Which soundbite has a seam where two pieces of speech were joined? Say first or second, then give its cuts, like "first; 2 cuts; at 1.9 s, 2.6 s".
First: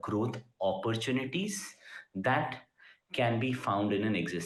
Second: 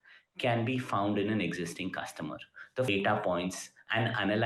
second; 1 cut; at 2.9 s